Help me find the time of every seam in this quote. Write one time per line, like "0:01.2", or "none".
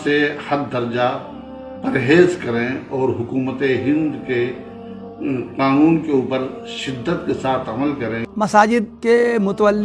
0:08.2
0:08.9

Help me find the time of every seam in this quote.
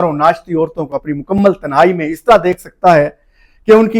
none

